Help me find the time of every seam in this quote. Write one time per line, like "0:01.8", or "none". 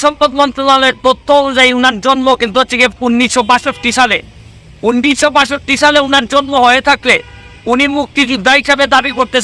none